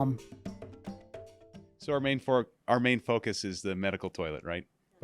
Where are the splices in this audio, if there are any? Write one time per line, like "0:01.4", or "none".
0:01.7